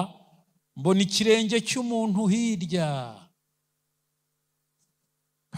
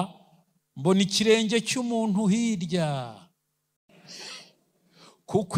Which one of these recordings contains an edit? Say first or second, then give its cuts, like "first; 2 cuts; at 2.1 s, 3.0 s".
second; 1 cut; at 3.9 s